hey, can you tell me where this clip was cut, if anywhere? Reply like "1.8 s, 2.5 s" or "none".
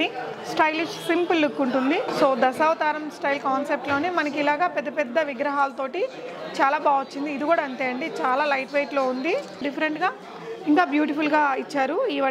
2.1 s, 9.6 s